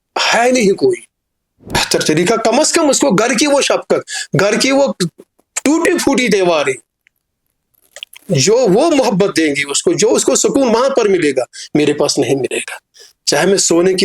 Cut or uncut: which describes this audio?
cut